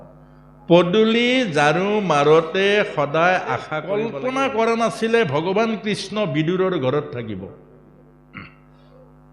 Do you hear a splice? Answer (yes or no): yes